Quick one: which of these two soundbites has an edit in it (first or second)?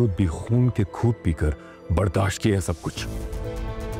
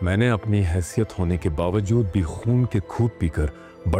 first